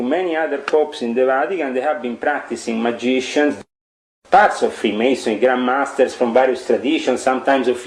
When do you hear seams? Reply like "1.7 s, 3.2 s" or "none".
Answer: 3.6 s

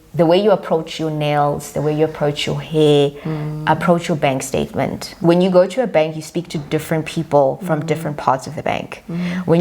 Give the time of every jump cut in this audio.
5.1 s

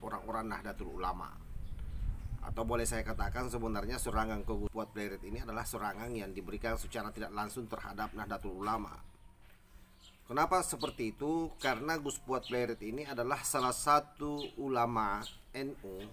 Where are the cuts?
4.7 s

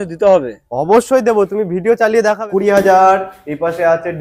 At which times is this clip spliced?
2.4 s

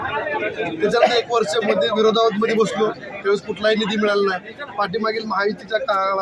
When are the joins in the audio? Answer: none

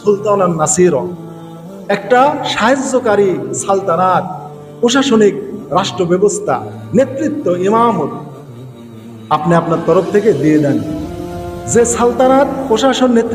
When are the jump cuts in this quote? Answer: none

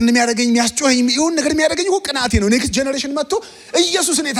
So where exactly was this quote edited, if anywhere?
none

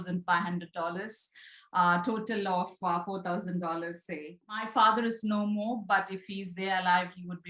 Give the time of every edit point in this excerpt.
4.6 s

